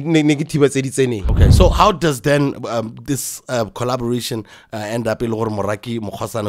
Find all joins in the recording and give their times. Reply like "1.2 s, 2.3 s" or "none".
1.2 s